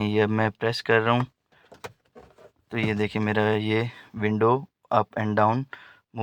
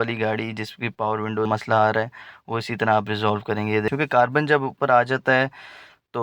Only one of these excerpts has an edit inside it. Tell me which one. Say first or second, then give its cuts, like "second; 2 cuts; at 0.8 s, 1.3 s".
second; 2 cuts; at 1.6 s, 3.9 s